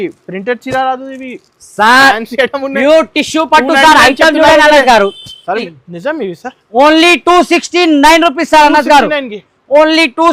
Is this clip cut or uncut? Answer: cut